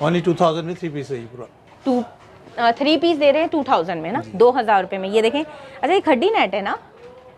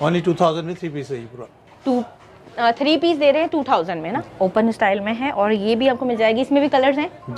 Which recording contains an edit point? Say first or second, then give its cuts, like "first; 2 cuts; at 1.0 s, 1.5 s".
second; 1 cut; at 4.2 s